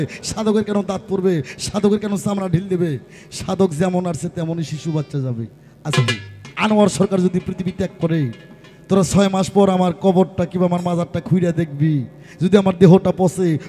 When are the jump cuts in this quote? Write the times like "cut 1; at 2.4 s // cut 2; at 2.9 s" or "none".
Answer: cut 1; at 6.4 s